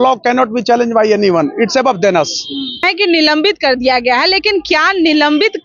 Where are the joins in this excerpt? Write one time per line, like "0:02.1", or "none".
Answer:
0:02.9